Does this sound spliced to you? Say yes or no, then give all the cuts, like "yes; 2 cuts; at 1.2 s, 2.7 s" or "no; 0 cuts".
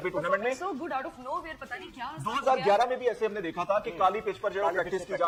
no; 0 cuts